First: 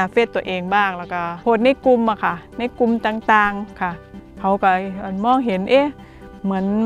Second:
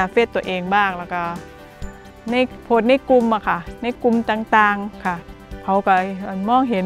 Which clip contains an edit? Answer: first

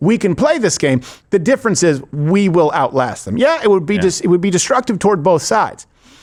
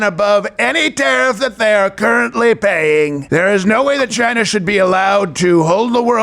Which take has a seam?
second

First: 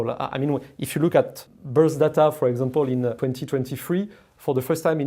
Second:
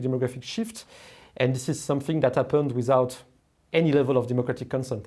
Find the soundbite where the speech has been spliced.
first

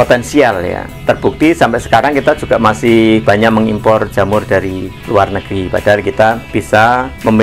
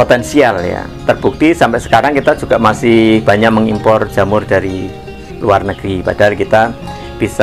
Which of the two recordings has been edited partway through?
first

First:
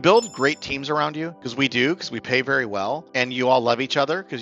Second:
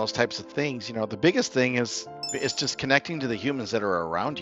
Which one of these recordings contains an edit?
first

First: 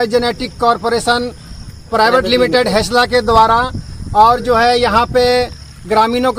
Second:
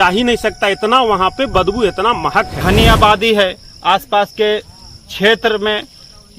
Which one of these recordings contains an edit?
second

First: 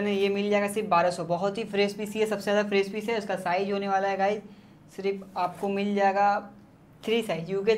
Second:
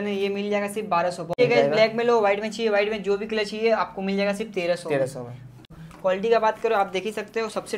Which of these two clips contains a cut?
second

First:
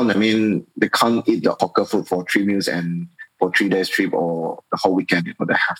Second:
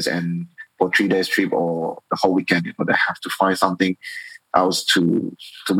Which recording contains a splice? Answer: first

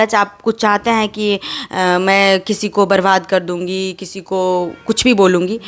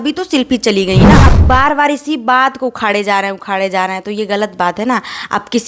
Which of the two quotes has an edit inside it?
second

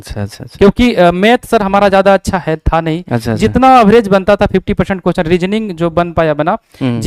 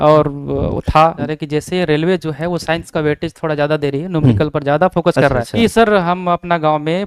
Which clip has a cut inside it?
second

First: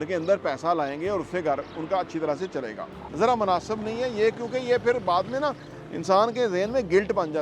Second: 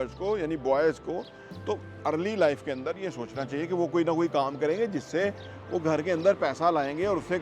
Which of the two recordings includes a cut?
first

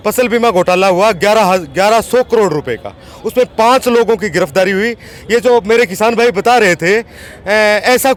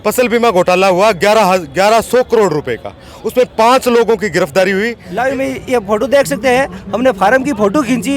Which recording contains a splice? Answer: second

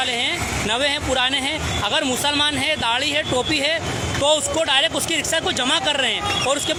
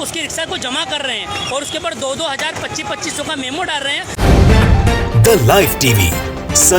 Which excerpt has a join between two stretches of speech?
second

